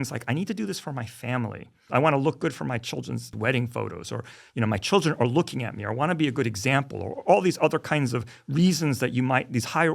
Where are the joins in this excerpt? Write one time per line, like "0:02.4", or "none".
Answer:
0:01.8
0:03.3

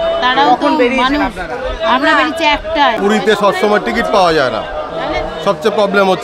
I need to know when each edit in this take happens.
0:03.0

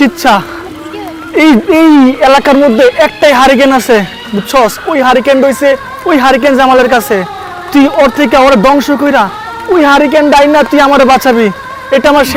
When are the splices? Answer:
none

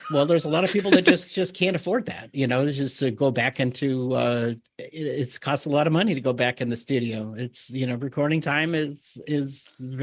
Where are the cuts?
none

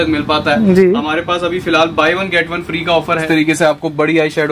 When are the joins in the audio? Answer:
0:03.2

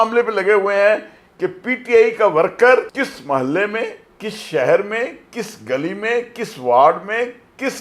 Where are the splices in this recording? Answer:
0:02.9

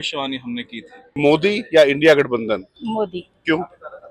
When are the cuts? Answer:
0:01.2
0:02.7

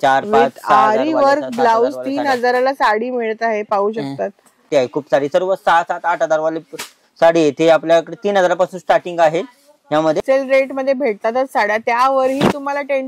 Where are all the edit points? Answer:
0:04.7
0:10.2

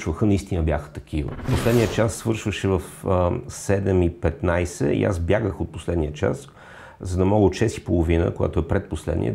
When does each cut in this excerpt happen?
0:01.5

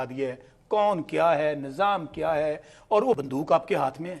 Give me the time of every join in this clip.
0:03.2

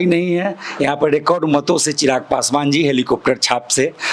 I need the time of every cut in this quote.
none

